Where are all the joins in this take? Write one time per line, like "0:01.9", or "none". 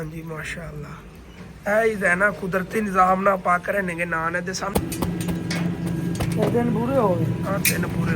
0:04.7